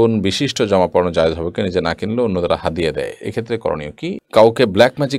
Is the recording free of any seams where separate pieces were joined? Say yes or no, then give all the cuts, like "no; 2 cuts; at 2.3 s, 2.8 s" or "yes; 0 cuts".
no; 1 cut; at 4.2 s